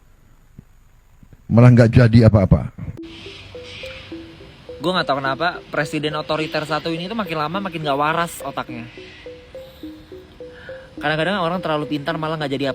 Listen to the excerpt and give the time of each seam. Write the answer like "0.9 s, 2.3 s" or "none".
3.0 s